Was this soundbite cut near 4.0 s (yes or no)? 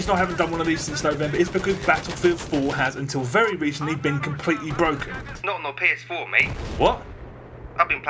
no